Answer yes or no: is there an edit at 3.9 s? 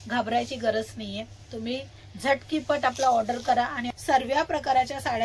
yes